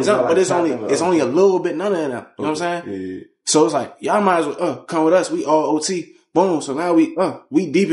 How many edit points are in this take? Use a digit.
0